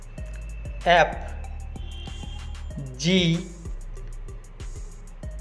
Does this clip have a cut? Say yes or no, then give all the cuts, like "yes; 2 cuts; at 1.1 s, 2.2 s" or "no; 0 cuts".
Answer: no; 0 cuts